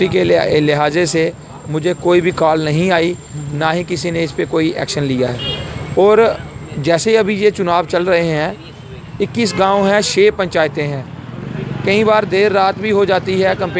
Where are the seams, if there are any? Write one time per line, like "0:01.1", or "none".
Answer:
none